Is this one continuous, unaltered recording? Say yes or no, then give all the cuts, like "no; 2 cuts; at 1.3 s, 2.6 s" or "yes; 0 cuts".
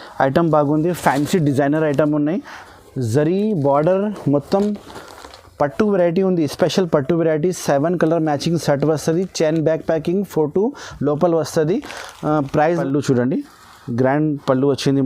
no; 2 cuts; at 2.6 s, 12.7 s